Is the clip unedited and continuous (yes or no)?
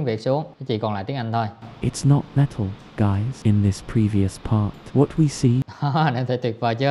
no